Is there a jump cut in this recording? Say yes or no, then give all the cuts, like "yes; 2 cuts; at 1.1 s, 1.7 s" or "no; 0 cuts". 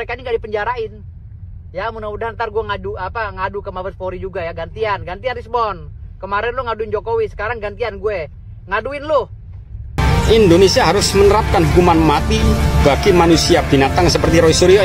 yes; 1 cut; at 10.0 s